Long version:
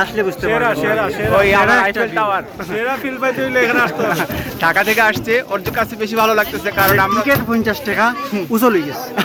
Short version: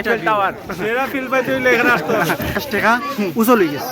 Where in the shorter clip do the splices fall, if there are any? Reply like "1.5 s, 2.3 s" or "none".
2.6 s